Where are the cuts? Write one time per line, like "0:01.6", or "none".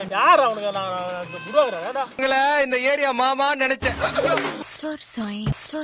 0:04.6